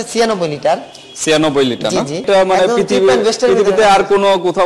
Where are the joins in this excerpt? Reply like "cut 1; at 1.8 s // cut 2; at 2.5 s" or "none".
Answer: cut 1; at 2.2 s